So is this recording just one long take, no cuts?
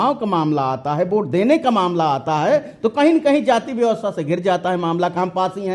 yes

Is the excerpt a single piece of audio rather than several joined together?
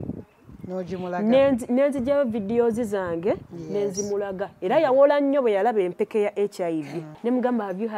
no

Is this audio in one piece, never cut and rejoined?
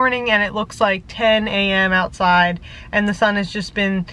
yes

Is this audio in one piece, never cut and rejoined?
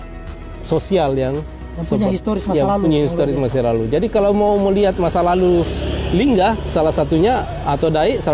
yes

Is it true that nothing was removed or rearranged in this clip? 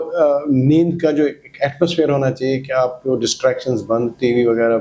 yes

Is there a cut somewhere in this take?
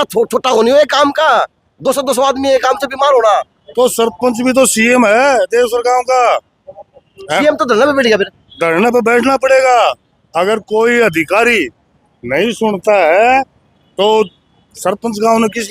no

